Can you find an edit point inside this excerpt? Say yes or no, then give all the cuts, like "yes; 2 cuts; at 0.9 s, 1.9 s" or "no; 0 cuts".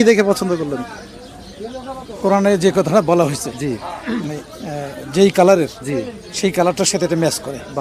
no; 0 cuts